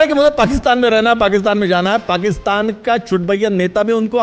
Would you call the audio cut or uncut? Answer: uncut